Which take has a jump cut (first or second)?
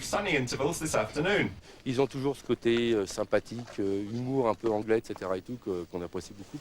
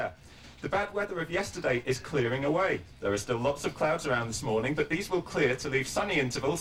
first